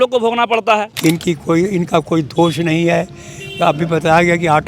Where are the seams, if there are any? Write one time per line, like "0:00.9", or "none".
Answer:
0:00.9

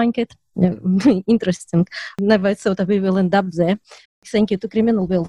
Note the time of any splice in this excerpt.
0:04.2

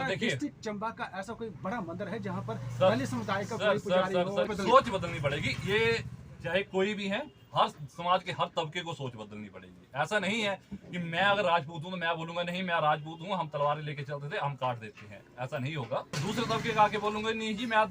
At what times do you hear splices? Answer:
0:04.5
0:16.2

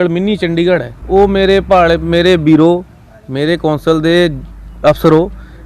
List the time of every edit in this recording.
0:00.9

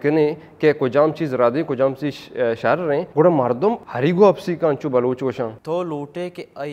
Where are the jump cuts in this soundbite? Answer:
0:03.1
0:03.9
0:05.6

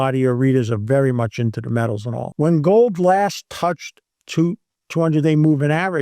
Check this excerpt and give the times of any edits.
0:02.2

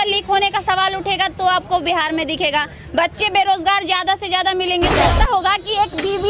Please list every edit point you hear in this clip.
0:05.1

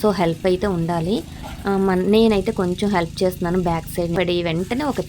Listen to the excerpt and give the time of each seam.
0:04.2

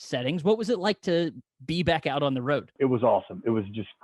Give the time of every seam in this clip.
0:02.7

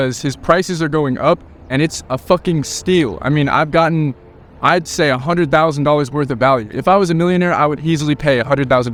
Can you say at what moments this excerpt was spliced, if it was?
none

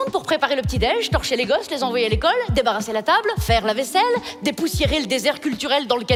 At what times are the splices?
none

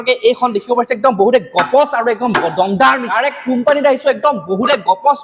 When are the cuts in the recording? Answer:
0:03.1

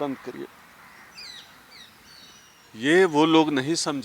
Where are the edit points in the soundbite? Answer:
0:02.6

